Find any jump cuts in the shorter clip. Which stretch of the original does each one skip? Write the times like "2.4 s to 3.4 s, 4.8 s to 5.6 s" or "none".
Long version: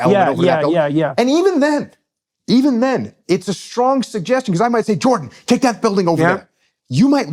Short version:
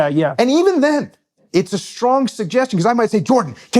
2.2 s to 3.1 s